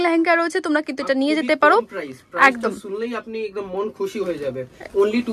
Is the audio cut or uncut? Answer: uncut